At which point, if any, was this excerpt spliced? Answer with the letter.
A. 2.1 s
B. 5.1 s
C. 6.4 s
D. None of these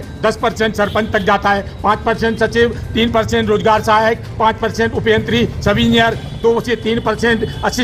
D